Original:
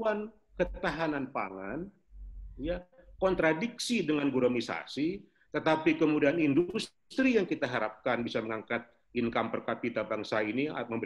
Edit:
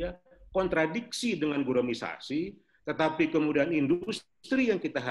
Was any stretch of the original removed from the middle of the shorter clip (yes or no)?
no